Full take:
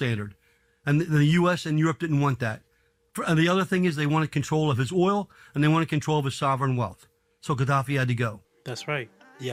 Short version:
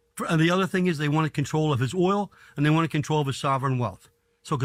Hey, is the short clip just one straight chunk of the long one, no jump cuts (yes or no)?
yes